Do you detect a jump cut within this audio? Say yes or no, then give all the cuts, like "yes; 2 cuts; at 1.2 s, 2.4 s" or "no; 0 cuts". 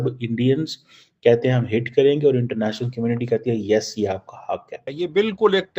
yes; 1 cut; at 4.8 s